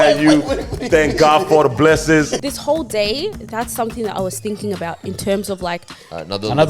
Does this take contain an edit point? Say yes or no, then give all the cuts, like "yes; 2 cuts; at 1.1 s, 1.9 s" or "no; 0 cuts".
yes; 1 cut; at 2.4 s